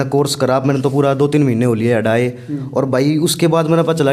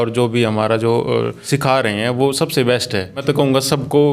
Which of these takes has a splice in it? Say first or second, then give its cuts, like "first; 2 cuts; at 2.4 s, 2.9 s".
second; 2 cuts; at 1.4 s, 3.2 s